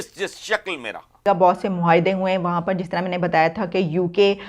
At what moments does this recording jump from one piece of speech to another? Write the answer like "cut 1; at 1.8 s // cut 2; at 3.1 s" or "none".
cut 1; at 1.2 s